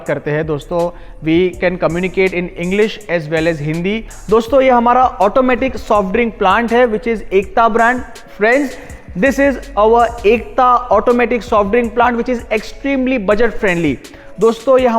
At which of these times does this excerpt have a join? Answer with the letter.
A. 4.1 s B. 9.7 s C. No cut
A